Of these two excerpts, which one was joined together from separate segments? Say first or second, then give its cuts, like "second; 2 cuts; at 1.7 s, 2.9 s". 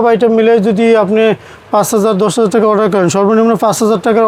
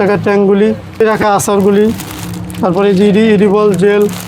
second; 1 cut; at 1.0 s